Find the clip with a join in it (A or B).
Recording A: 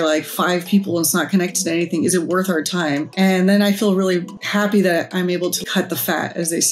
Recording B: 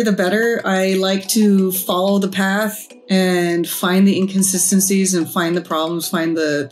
A